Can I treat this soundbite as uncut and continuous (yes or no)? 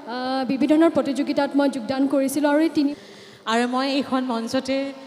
no